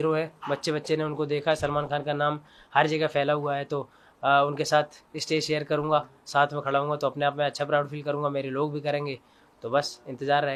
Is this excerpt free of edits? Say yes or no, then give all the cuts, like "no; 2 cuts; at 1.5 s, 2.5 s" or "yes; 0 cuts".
yes; 0 cuts